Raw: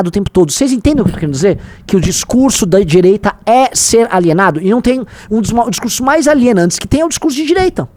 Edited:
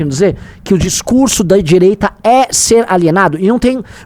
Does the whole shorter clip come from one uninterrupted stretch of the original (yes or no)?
yes